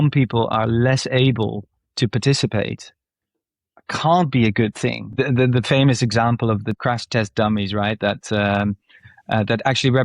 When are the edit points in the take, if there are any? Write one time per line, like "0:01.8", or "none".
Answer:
0:05.2
0:06.7

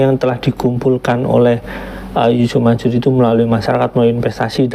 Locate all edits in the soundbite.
none

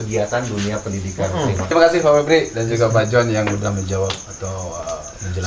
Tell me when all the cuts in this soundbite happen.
0:01.7

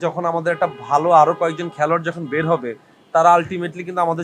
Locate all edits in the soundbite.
none

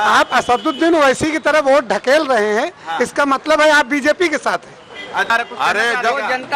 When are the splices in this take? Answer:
0:01.4
0:05.3

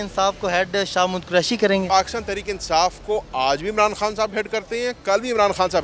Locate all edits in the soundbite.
0:01.9

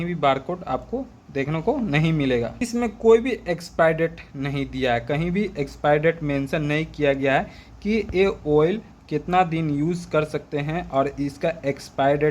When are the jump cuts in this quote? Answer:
0:02.7

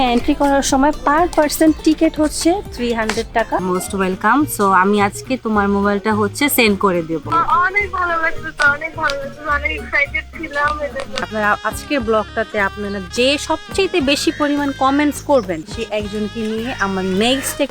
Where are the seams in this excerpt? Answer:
0:03.6
0:07.3
0:11.3

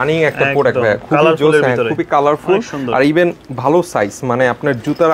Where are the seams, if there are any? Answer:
none

